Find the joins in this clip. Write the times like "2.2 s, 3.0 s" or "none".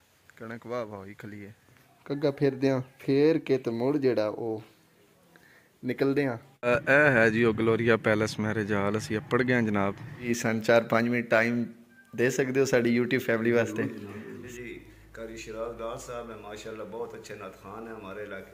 1.9 s, 2.9 s, 6.5 s, 10.3 s, 14.4 s